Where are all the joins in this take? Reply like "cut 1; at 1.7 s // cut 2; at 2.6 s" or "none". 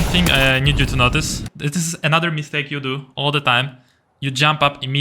cut 1; at 1.4 s